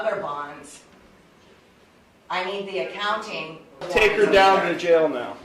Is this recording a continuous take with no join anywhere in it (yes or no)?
no